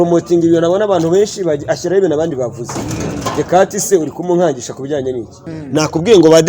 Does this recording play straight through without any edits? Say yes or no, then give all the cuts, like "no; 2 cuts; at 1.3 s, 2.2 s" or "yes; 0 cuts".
no; 1 cut; at 5.5 s